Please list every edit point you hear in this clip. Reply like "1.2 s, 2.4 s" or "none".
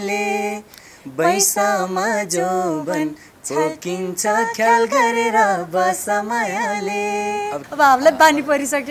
7.6 s

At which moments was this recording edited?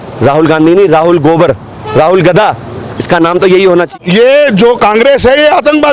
3.9 s

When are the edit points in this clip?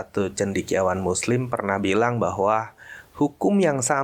none

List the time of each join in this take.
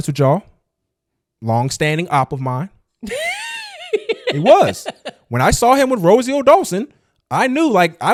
none

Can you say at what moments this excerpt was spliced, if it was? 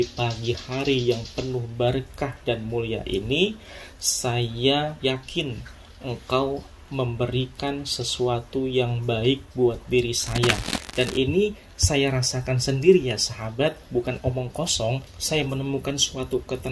5.0 s, 10.8 s

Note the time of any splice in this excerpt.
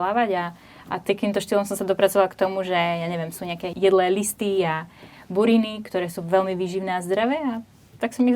3.6 s

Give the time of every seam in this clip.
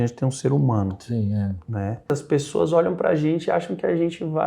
2.1 s

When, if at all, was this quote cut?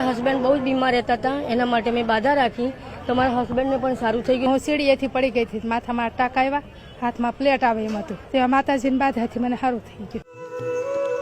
4.5 s, 8.2 s, 10.4 s

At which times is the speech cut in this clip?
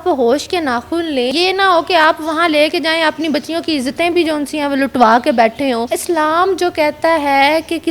1.3 s, 5.9 s

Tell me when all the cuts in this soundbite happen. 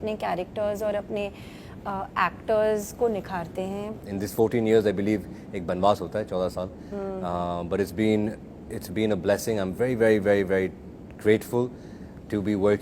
4.0 s

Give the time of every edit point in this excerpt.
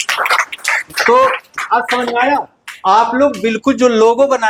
none

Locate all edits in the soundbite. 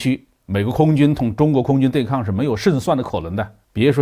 none

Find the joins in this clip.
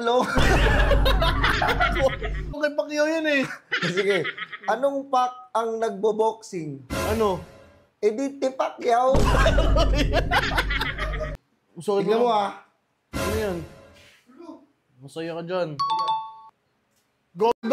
2.6 s, 11.4 s

